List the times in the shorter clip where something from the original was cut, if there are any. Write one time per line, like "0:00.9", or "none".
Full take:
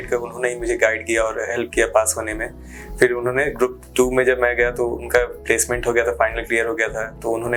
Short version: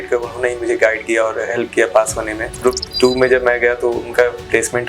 0:02.6

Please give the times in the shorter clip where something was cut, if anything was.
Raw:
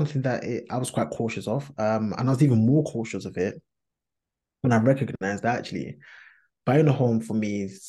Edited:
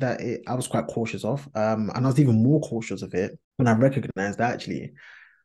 0:03.4

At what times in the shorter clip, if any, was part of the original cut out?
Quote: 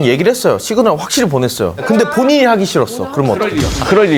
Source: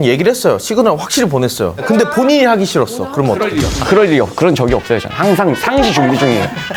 none

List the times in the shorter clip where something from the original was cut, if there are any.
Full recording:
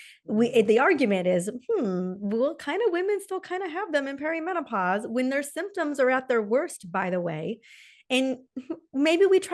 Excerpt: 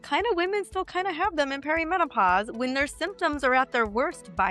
none

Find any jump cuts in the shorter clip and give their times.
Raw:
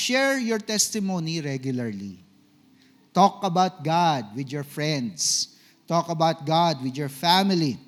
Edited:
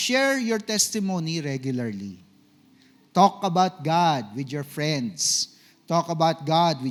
none

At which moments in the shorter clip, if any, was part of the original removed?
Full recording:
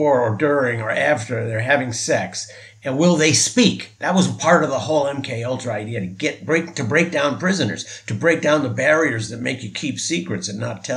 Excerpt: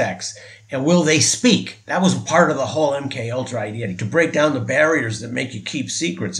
0:03.9

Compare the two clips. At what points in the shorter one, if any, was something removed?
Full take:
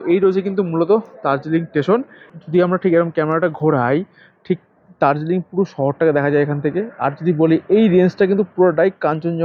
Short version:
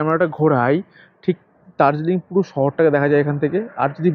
none

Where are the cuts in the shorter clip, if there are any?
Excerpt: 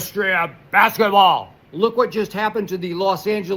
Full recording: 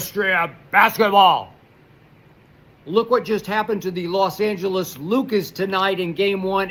0:01.6

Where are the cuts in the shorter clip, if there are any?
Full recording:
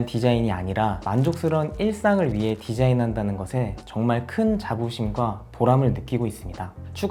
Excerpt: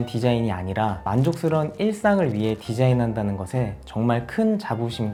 none

